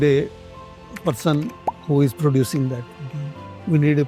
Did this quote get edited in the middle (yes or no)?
no